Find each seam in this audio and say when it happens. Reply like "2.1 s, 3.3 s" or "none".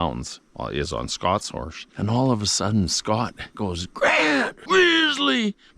3.5 s, 4.6 s